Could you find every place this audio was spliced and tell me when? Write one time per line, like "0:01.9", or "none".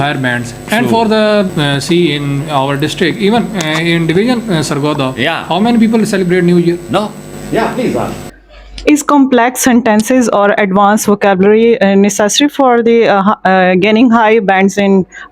0:01.5
0:07.3